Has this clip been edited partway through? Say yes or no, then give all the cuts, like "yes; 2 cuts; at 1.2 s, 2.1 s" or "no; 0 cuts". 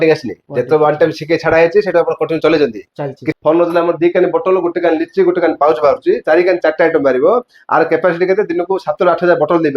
yes; 1 cut; at 3.2 s